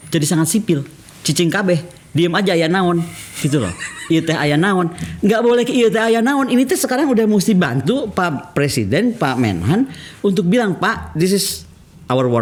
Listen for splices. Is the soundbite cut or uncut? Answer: uncut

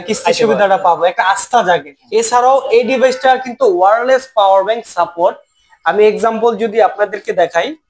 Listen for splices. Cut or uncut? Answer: cut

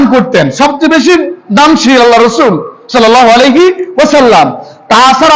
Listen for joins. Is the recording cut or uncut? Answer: uncut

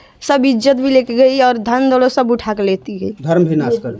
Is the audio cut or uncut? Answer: uncut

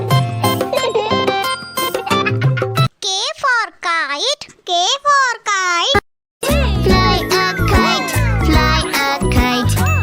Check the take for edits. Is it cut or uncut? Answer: cut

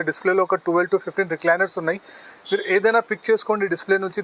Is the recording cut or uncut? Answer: uncut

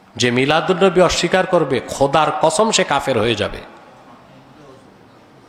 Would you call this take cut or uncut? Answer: uncut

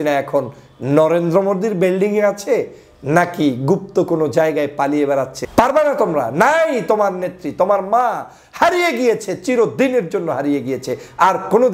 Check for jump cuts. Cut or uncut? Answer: cut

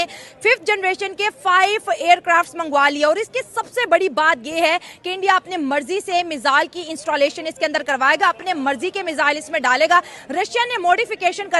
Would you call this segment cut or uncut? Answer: uncut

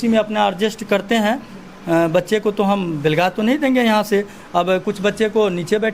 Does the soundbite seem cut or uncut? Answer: uncut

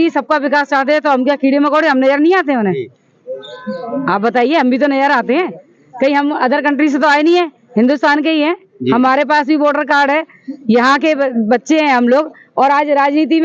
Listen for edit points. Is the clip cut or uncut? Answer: uncut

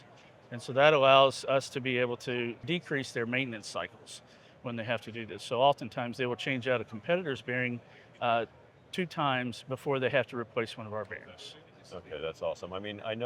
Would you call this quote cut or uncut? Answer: uncut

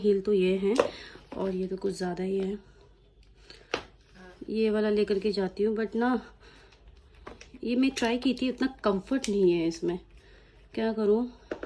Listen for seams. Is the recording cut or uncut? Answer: uncut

